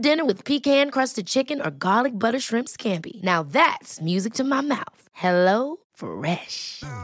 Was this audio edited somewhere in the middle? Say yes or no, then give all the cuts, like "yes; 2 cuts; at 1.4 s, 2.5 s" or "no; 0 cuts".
no; 0 cuts